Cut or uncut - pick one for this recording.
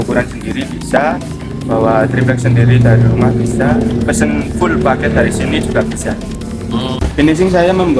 cut